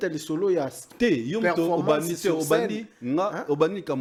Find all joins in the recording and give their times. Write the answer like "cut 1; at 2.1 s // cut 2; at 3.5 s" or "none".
none

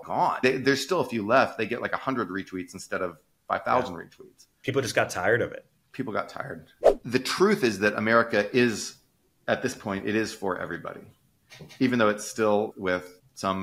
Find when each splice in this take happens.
cut 1; at 6.7 s // cut 2; at 12.7 s

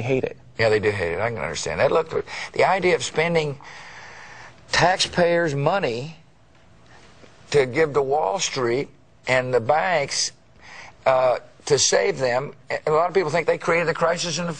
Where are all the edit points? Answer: none

